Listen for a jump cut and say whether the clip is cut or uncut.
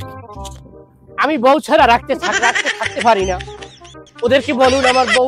uncut